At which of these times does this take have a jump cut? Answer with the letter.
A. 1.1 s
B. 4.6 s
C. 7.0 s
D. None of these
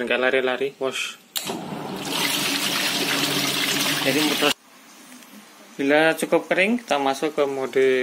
B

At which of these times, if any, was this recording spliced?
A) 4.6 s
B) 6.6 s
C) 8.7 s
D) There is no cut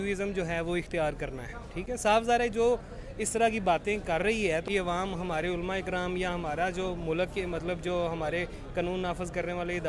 A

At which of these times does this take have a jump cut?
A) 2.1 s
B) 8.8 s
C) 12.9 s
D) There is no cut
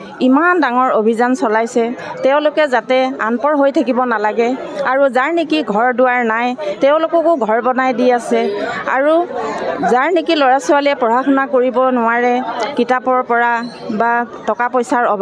D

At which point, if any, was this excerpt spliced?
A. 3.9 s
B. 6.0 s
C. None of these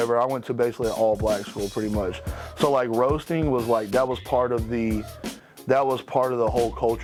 C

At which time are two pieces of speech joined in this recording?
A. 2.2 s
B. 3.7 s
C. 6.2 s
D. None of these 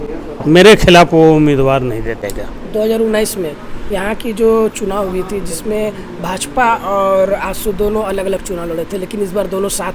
A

